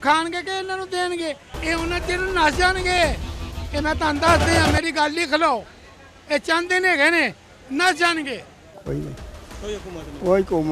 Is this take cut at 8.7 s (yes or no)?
yes